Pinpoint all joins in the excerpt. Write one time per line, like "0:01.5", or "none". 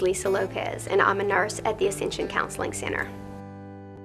0:03.0